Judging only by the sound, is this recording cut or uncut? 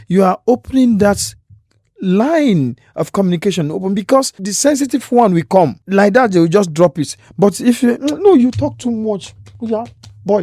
cut